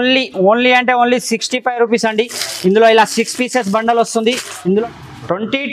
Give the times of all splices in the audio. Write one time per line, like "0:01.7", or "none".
0:04.7